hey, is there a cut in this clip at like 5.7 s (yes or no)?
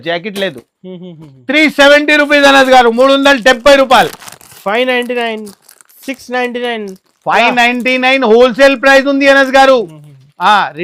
no